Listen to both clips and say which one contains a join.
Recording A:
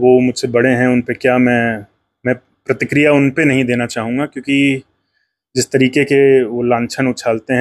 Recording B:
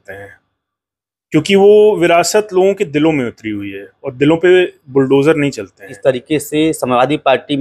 B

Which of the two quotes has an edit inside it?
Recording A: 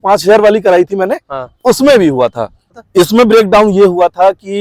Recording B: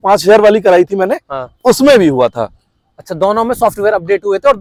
A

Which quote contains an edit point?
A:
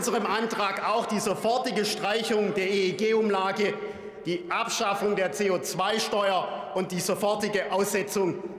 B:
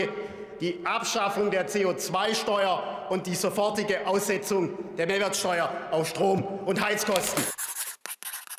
B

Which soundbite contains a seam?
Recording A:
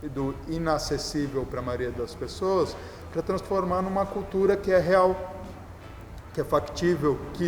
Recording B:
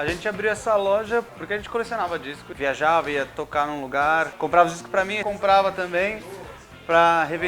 B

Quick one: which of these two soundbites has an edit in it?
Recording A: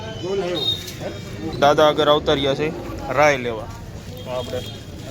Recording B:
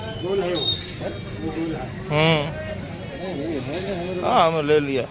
A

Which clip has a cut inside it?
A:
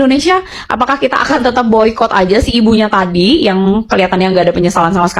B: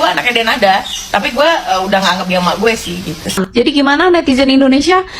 B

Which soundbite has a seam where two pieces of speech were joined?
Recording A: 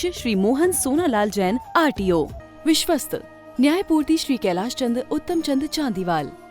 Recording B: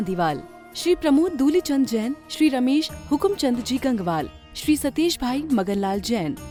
A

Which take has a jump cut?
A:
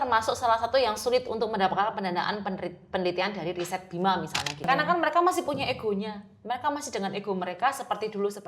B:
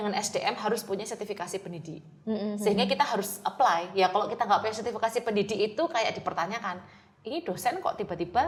A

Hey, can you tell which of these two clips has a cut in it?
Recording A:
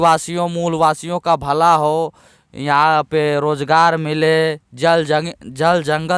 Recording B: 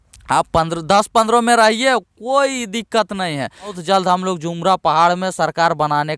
B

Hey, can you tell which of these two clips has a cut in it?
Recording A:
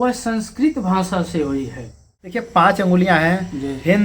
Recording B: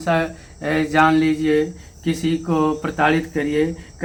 A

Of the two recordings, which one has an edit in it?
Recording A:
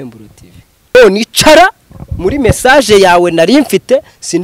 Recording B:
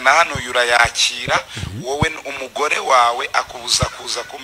A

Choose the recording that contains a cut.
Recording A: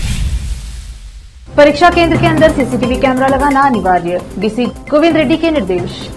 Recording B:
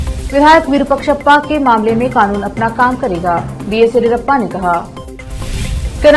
A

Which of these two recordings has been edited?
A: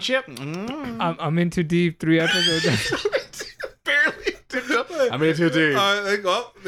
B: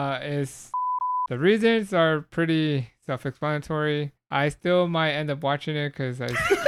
B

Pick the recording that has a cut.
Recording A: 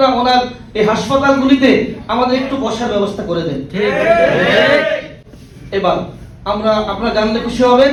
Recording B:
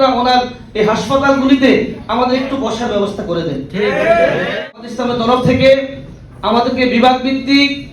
B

